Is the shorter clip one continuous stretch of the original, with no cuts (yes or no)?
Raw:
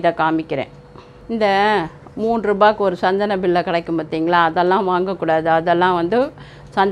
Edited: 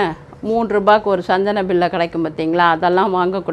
yes